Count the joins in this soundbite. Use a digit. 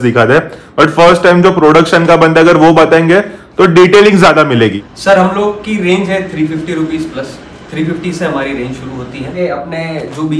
2